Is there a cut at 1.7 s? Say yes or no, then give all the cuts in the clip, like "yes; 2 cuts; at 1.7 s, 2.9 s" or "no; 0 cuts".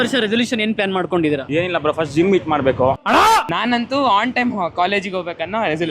no; 1 cut; at 3.0 s